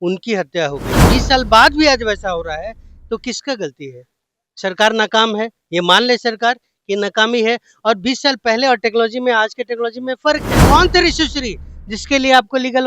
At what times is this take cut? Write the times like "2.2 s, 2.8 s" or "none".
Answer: 1.0 s, 10.6 s